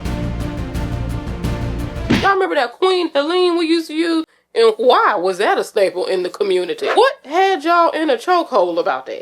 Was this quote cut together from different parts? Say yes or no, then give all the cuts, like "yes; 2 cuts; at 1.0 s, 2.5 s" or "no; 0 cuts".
yes; 2 cuts; at 2.2 s, 6.8 s